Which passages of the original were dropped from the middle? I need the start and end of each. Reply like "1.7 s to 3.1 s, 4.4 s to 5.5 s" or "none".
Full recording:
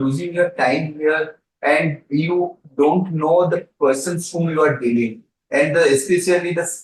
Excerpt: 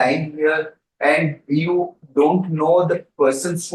none